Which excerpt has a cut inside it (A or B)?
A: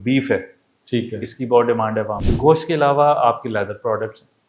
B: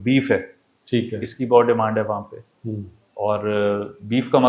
A